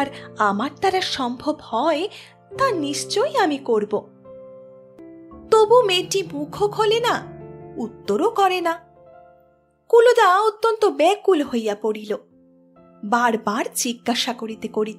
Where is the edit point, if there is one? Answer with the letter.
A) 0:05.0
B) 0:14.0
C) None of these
A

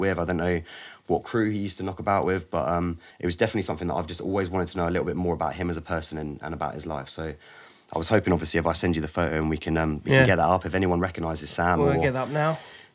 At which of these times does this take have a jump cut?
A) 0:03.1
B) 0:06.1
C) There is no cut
A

